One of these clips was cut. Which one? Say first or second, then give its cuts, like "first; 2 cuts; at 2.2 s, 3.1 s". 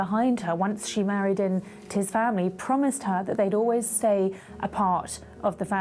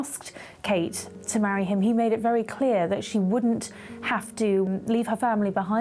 second; 2 cuts; at 1.1 s, 4.7 s